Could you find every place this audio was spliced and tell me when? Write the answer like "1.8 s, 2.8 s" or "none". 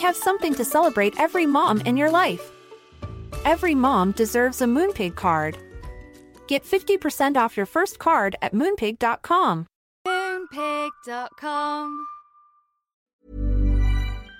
13.1 s